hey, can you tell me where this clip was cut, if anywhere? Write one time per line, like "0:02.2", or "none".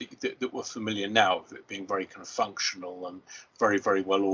none